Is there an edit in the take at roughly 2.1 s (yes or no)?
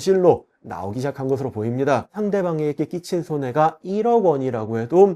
yes